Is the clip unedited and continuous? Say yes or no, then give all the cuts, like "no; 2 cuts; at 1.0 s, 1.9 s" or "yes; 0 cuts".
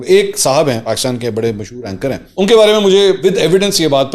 no; 3 cuts; at 0.8 s, 2.3 s, 3.2 s